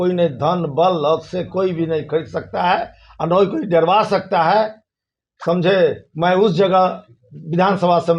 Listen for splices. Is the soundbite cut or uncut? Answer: uncut